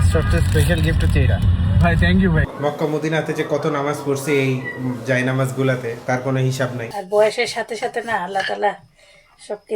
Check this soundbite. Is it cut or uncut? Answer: cut